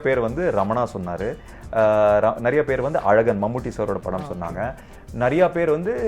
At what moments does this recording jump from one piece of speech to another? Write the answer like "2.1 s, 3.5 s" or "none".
none